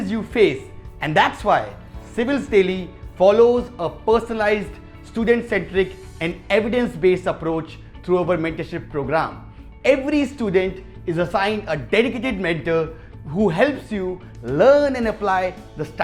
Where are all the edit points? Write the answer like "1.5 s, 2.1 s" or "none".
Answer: none